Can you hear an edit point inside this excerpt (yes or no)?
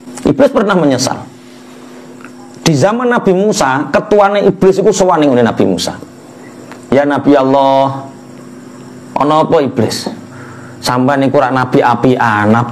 no